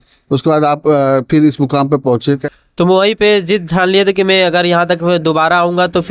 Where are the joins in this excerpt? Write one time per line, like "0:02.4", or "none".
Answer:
0:02.5